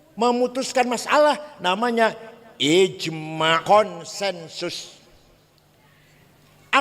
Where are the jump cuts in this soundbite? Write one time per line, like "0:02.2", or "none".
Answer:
0:03.6